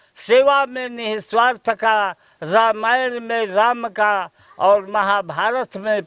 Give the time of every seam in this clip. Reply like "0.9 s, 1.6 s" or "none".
none